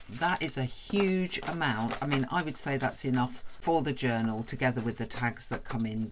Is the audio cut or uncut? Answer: cut